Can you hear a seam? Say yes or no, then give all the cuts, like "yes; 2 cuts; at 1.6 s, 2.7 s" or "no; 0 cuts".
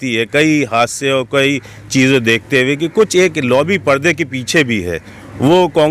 no; 0 cuts